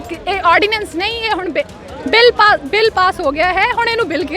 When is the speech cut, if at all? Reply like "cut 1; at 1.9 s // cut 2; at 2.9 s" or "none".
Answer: none